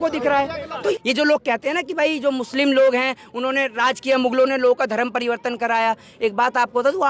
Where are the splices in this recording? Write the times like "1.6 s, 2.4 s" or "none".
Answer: 0.9 s